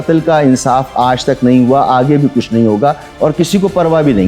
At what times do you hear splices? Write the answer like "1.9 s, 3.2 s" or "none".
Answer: none